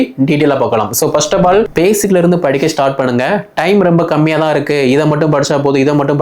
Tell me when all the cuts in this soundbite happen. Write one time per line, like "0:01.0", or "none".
0:01.7